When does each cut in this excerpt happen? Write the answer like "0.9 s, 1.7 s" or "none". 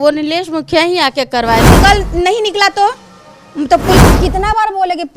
1.6 s, 4.0 s